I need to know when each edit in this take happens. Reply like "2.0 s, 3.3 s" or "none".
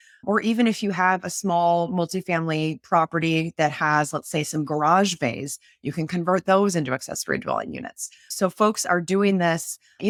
none